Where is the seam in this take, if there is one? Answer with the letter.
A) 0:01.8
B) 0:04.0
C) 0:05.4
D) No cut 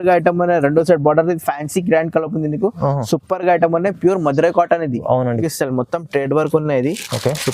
C